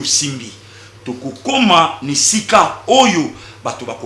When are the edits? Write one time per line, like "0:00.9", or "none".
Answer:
none